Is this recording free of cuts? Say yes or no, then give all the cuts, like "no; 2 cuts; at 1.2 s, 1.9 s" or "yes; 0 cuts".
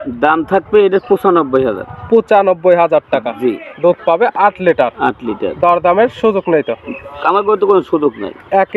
yes; 0 cuts